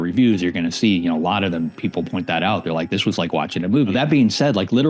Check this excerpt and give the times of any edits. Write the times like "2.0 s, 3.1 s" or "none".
3.9 s